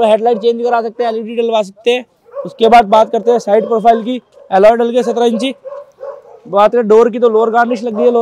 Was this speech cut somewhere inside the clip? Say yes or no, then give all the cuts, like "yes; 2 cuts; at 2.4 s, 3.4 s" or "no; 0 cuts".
no; 0 cuts